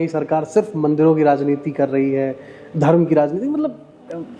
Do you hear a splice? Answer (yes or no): no